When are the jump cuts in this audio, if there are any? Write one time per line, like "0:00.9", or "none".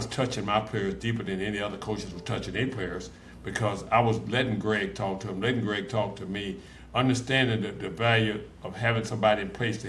none